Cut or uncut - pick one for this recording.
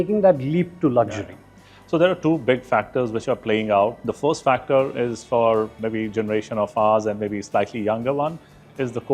uncut